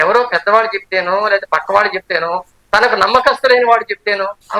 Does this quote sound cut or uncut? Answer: uncut